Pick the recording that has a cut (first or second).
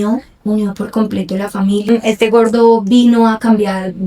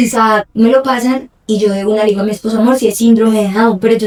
first